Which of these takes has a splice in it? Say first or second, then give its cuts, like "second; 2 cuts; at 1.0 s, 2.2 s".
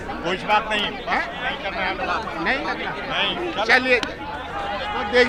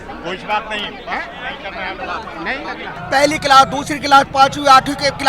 second; 1 cut; at 3.0 s